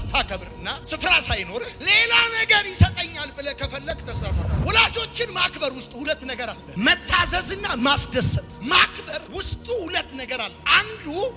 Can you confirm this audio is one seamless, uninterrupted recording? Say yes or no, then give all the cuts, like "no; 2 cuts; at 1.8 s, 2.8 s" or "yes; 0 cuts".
no; 1 cut; at 4.6 s